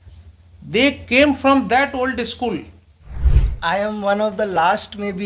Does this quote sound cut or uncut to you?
uncut